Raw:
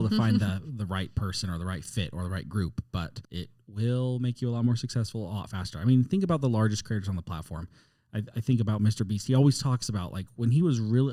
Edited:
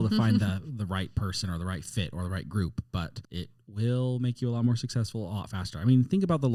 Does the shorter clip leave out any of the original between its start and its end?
no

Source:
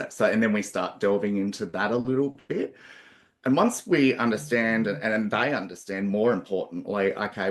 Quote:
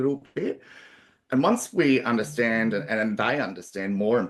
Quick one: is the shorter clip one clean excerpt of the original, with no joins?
yes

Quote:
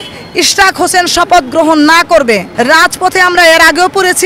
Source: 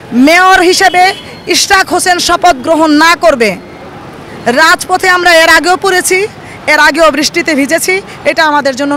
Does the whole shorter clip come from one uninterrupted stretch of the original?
no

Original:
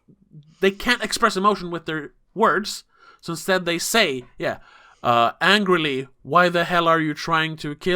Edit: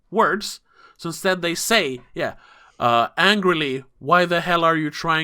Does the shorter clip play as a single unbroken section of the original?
yes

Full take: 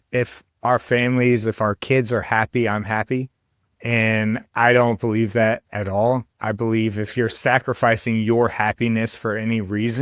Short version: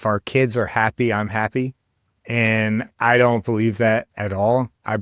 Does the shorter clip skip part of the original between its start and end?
no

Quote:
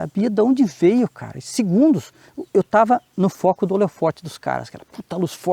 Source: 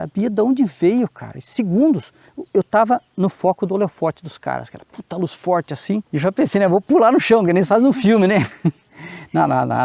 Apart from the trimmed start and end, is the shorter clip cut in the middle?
no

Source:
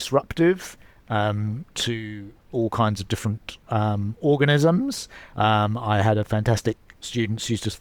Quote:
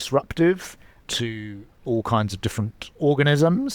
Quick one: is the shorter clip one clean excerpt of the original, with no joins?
no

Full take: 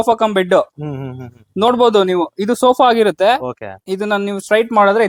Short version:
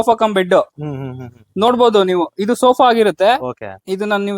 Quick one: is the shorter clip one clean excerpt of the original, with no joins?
yes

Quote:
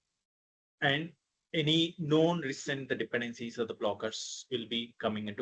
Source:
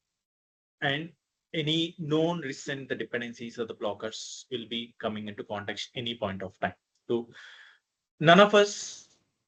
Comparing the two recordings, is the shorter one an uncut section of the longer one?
yes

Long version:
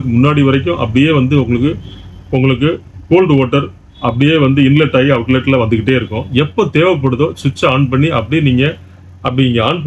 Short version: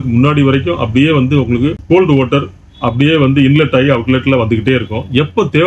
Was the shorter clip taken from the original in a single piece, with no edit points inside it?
no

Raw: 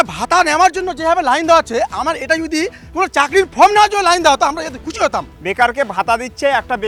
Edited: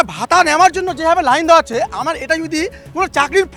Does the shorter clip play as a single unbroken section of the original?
yes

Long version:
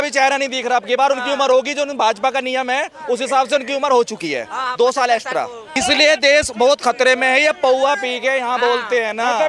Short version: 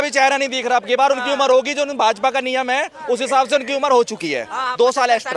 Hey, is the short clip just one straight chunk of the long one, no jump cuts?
yes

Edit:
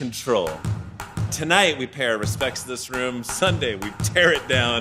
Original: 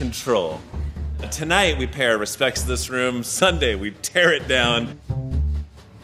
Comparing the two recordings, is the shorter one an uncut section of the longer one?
yes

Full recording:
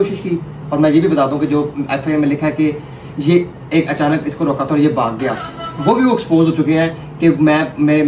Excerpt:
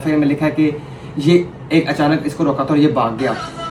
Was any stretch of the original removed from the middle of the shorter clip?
no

